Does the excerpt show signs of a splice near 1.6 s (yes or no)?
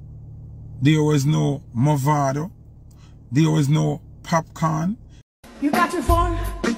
no